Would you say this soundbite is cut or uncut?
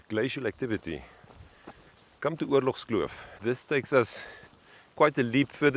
cut